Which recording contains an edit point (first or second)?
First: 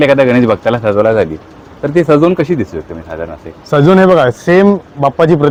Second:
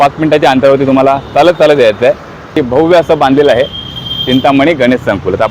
second